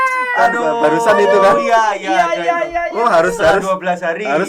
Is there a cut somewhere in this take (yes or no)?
no